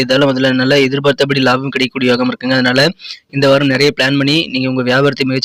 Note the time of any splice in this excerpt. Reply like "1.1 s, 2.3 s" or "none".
none